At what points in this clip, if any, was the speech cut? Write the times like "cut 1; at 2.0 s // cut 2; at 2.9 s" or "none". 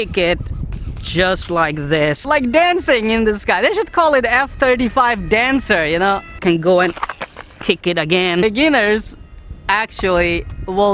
cut 1; at 2.2 s // cut 2; at 6.4 s // cut 3; at 8.4 s